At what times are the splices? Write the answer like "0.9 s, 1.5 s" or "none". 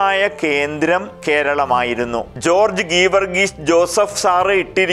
1.1 s, 2.3 s